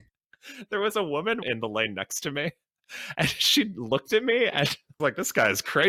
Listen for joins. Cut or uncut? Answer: cut